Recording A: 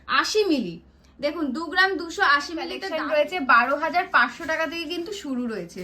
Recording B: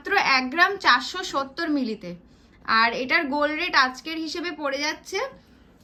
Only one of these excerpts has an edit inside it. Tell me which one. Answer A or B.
A